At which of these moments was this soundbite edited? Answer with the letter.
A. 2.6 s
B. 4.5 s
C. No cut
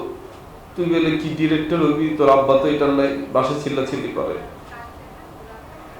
C